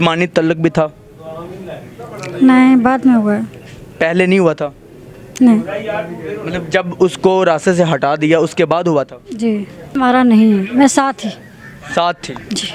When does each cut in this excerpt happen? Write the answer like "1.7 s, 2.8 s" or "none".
10.0 s